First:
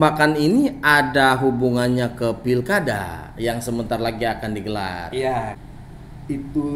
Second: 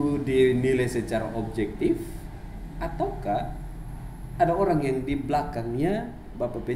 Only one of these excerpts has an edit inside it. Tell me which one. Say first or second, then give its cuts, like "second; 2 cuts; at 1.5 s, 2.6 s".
first; 1 cut; at 5.6 s